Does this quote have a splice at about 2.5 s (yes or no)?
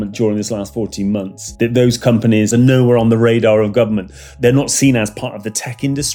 yes